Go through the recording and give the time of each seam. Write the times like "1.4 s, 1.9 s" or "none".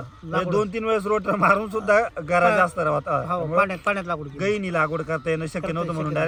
none